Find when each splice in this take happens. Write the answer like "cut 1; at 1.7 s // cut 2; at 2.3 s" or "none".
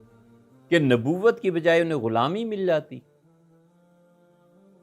none